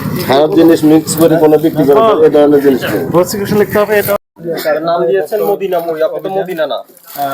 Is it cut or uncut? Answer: cut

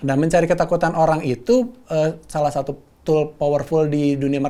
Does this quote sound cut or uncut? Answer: uncut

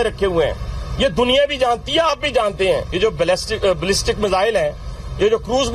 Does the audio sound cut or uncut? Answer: cut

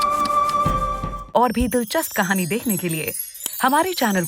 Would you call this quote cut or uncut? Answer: cut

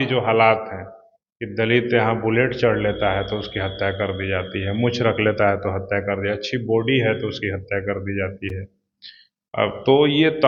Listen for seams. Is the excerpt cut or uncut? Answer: uncut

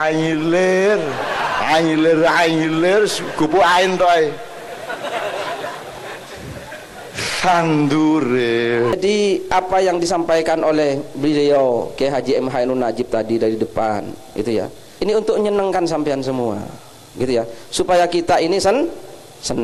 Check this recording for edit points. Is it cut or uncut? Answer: uncut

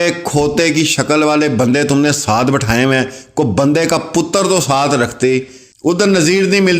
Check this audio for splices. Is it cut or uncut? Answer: cut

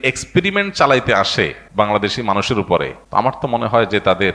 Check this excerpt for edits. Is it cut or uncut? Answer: cut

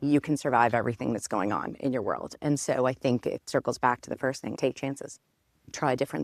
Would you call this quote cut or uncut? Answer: uncut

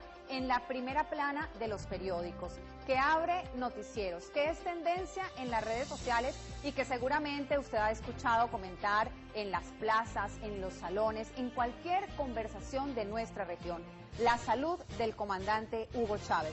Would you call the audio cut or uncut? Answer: uncut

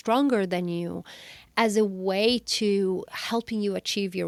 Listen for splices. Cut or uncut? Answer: uncut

